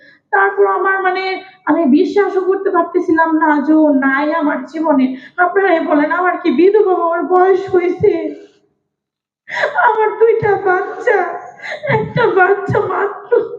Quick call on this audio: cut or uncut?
uncut